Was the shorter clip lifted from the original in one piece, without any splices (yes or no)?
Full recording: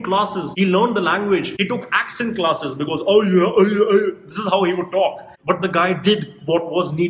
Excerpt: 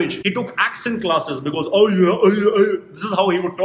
yes